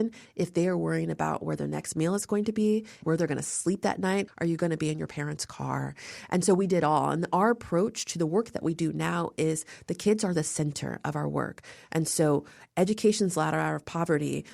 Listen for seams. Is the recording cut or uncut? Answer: cut